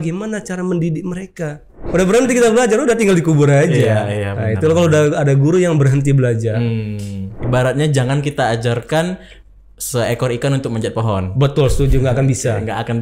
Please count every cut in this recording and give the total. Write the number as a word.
two